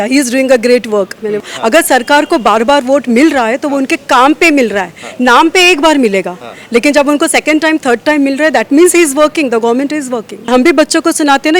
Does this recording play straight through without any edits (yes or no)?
no